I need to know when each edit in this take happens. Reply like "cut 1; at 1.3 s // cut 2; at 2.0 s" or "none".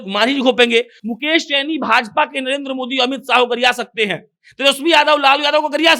cut 1; at 1.0 s